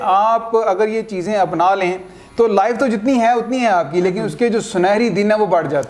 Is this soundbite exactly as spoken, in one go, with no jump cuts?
yes; 0 cuts

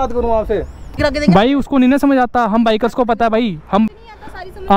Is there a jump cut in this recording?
yes; 2 cuts; at 1.0 s, 3.9 s

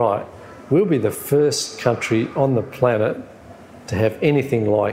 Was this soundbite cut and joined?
no; 0 cuts

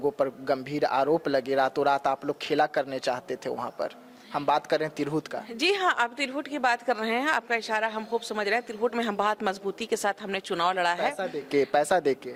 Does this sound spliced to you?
no; 0 cuts

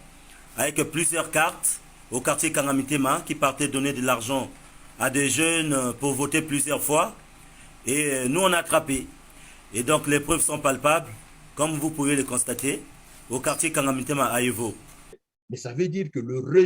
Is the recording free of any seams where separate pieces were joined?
no; 1 cut; at 15.3 s

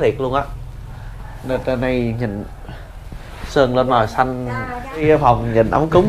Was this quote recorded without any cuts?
no; 1 cut; at 5.0 s

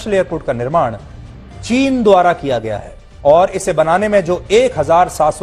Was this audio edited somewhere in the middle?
no; 0 cuts

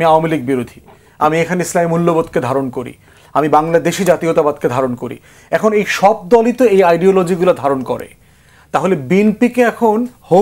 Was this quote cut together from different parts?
no; 0 cuts

